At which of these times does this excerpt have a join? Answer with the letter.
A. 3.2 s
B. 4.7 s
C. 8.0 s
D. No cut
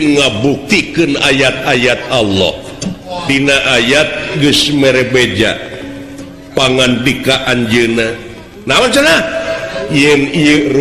A